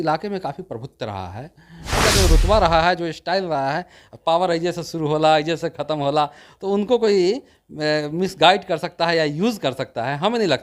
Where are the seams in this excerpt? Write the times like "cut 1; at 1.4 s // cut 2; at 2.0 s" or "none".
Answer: cut 1; at 2.0 s